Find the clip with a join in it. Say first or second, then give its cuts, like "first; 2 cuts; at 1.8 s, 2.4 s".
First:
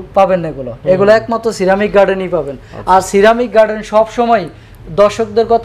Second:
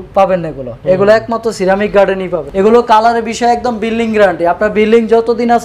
second; 1 cut; at 2.4 s